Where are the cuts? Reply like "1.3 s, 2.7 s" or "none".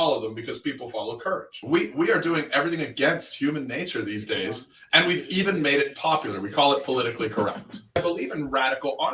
1.5 s, 8.0 s